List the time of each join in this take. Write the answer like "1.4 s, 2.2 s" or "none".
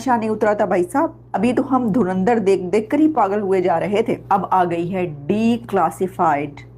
1.2 s, 4.2 s